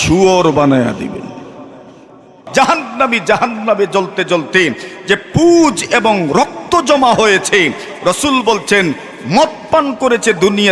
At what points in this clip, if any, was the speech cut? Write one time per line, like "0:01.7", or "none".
0:02.3